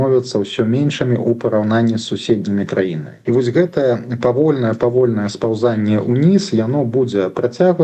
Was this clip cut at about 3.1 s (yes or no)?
yes